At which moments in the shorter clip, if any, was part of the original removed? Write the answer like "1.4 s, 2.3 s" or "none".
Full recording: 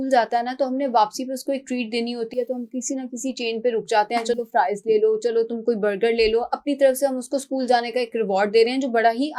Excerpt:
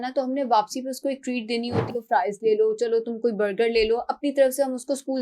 1.9 s